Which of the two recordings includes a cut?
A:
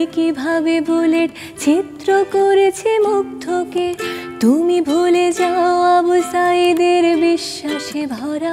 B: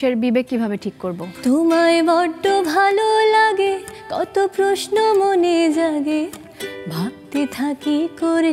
B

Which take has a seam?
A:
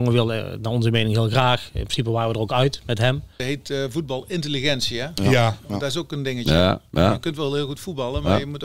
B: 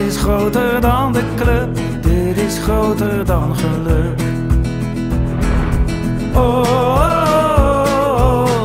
A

